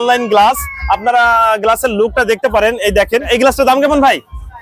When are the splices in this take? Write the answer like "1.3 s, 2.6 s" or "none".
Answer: 3.3 s